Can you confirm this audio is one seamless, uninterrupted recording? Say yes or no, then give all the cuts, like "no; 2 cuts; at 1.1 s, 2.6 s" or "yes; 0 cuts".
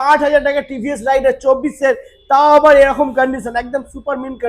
yes; 0 cuts